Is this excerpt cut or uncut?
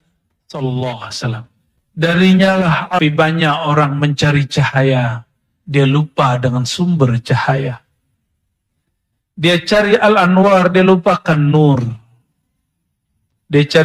cut